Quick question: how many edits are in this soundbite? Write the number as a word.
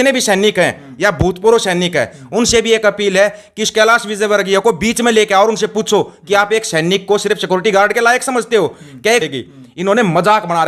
one